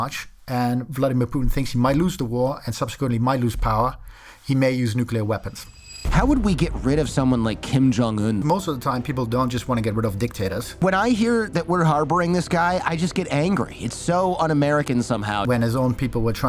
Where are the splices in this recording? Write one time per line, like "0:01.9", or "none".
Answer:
0:06.0
0:08.4
0:10.8
0:15.4

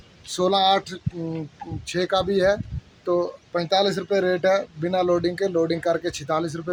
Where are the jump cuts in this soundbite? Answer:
none

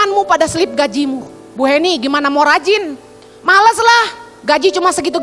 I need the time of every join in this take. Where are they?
none

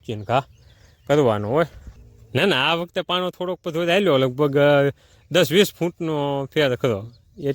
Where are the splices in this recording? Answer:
0:01.9

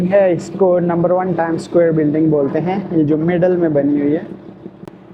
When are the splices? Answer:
none

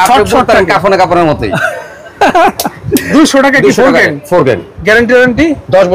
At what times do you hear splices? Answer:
0:03.1
0:04.8

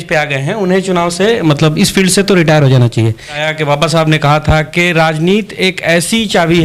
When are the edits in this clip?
0:03.4

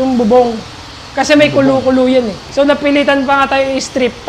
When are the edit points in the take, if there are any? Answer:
0:02.4

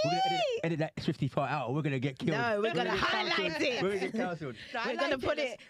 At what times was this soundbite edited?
none

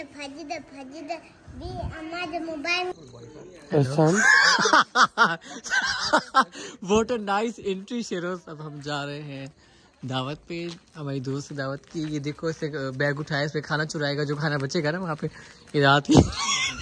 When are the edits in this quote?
0:02.9

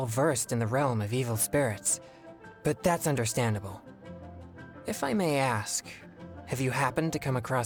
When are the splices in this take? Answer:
none

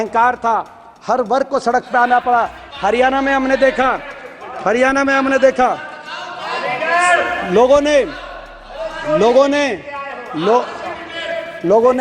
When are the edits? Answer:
none

